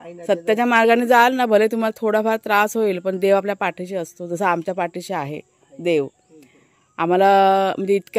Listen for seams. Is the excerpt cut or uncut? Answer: uncut